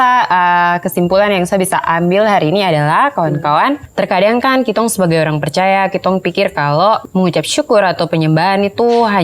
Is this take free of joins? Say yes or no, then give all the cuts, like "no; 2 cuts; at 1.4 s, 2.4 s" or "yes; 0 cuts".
no; 2 cuts; at 3.9 s, 7.0 s